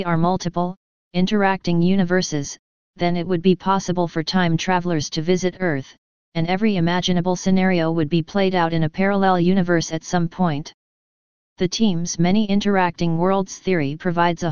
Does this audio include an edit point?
yes; 1 cut; at 12.2 s

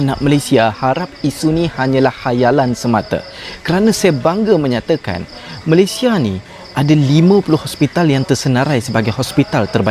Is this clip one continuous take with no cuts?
yes; 0 cuts

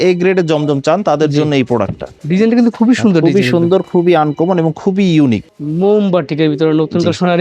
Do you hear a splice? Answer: yes; 2 cuts; at 2.1 s, 5.5 s

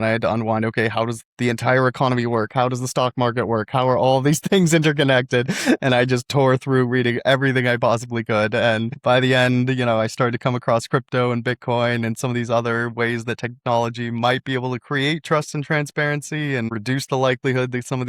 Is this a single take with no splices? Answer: yes; 0 cuts

